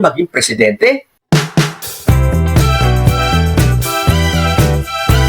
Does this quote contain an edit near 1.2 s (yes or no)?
yes